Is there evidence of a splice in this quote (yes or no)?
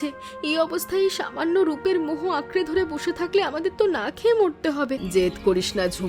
yes